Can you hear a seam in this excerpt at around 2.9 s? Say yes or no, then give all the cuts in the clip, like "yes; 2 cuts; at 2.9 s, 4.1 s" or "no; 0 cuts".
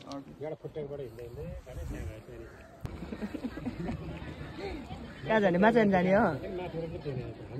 yes; 1 cut; at 2.9 s